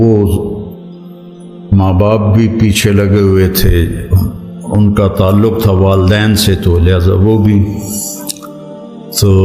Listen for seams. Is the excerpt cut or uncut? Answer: uncut